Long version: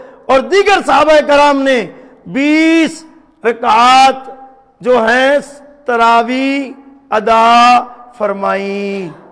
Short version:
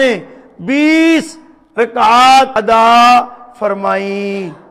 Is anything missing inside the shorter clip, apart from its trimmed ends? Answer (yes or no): yes